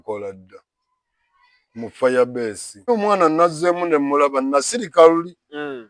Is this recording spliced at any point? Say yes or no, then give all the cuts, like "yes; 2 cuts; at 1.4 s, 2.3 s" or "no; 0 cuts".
yes; 1 cut; at 2.9 s